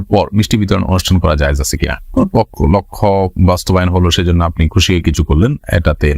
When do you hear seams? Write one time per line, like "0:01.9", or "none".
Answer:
none